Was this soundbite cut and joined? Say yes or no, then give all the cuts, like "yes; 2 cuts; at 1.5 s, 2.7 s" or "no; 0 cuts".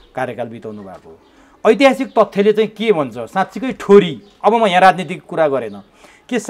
no; 0 cuts